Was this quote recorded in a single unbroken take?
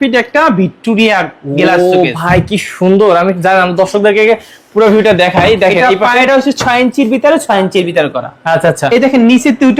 yes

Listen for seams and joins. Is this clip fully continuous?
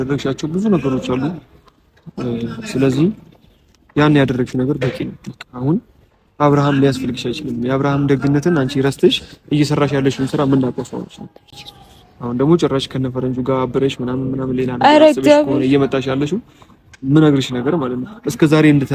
yes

